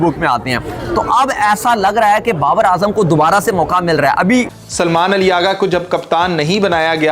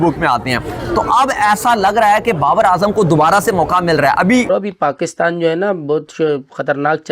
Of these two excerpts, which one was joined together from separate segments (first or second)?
second